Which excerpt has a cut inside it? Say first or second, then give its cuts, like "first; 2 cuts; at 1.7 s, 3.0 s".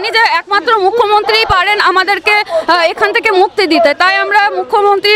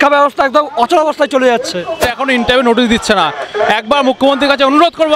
second; 1 cut; at 2.0 s